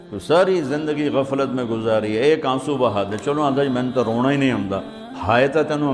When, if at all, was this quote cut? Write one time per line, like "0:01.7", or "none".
none